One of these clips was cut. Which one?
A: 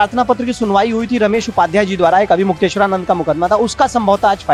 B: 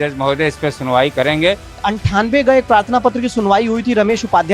B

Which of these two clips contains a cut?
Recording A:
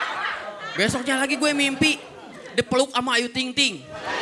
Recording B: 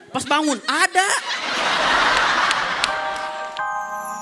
B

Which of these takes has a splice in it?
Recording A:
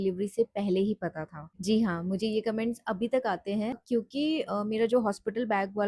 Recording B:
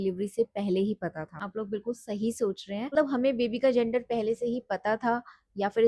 B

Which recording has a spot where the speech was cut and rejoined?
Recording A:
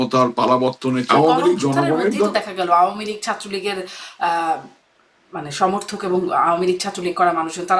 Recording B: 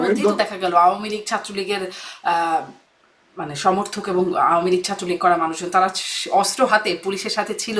A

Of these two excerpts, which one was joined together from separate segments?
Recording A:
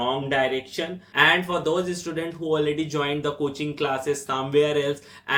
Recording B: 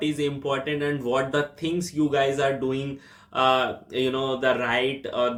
A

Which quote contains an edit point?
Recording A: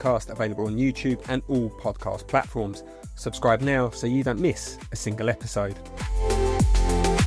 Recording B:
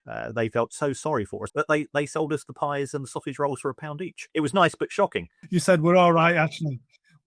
B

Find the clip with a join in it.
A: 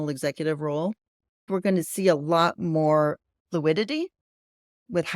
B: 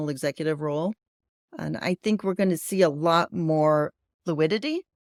A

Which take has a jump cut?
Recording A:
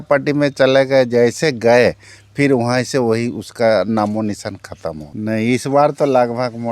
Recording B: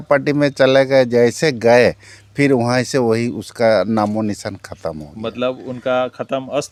A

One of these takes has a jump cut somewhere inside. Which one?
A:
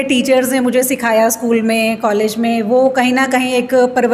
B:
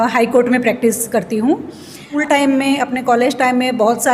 B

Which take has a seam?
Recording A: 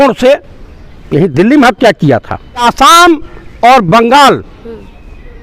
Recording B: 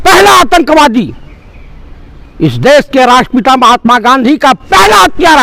A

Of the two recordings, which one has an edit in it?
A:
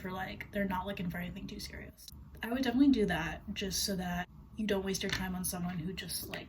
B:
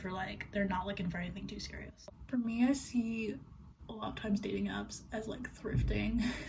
B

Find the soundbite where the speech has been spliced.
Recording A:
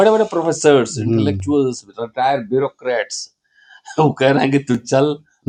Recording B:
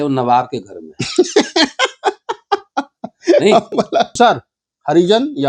B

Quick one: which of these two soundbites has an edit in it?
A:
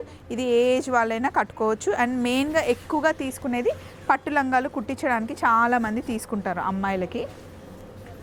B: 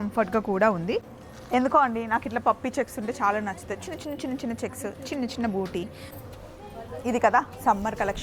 B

